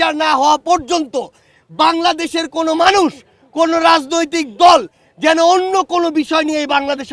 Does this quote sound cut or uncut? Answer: uncut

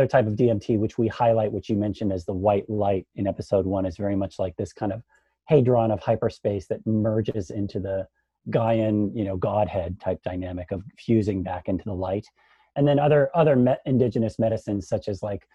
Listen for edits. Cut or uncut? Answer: uncut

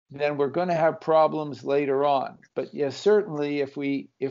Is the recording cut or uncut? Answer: uncut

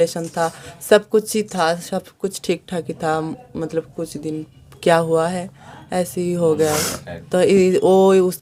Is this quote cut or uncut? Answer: uncut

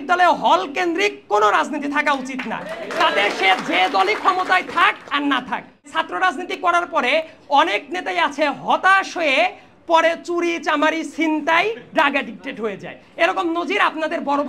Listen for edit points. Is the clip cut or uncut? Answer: cut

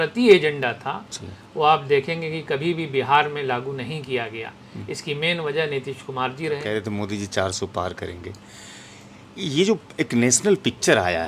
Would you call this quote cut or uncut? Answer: uncut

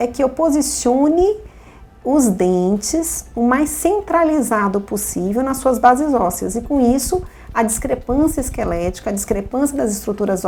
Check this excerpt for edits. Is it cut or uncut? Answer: uncut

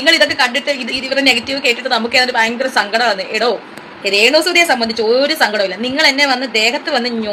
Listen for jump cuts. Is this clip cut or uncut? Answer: uncut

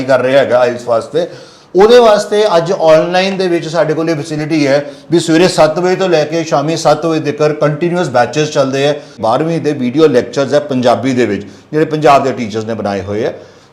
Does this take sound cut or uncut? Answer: cut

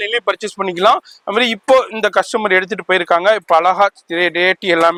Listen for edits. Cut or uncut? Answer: uncut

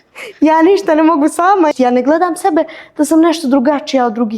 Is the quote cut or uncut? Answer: cut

